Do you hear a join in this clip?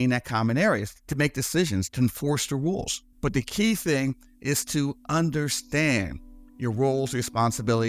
yes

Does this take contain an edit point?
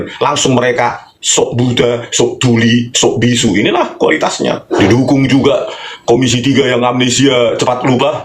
yes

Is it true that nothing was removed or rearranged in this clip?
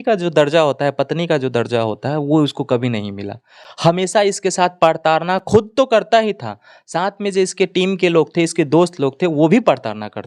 yes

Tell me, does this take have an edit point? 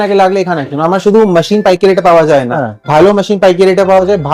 no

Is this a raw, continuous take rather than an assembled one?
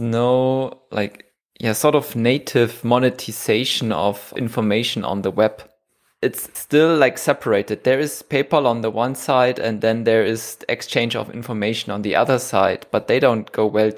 yes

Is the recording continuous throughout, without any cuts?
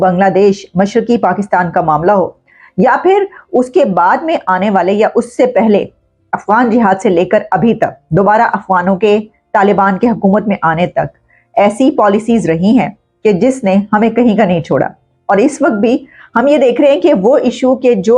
yes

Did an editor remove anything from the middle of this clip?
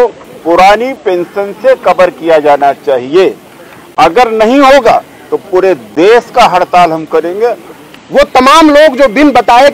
yes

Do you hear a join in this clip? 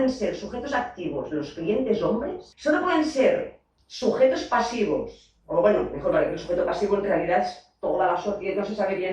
yes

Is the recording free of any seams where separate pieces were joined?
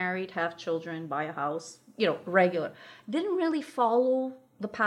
yes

